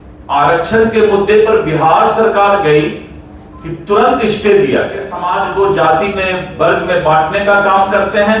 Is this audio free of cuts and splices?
no; 1 cut; at 5.2 s

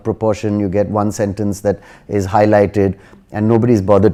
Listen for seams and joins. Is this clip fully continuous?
yes; 0 cuts

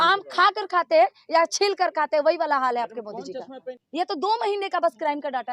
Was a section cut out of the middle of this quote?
yes; 1 cut; at 3.7 s

